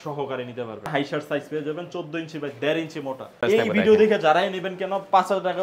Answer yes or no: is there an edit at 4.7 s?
no